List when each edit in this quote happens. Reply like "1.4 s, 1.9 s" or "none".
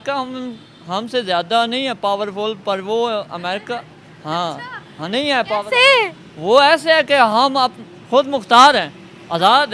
none